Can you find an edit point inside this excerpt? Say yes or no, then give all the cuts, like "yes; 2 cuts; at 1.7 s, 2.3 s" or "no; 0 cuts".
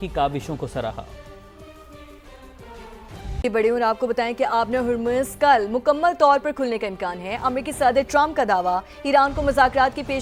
yes; 1 cut; at 3.4 s